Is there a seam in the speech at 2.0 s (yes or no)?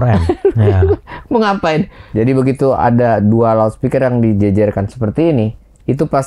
yes